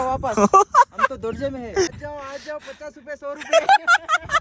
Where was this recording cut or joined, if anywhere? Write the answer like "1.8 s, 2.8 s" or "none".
2.0 s